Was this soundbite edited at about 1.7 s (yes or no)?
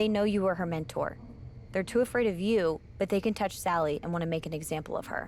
no